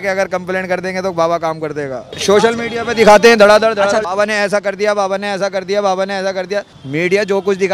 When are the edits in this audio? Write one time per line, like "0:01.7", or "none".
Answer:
0:02.2
0:04.0
0:06.7

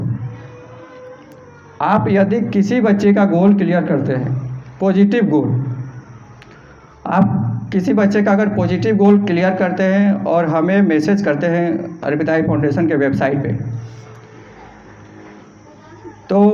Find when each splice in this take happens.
none

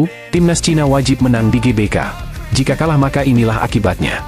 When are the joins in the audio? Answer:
none

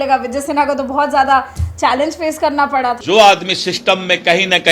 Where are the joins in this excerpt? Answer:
0:03.0

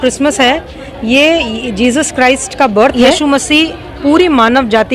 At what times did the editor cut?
0:02.9

